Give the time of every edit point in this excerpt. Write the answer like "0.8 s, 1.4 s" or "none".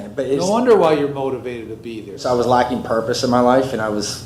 2.1 s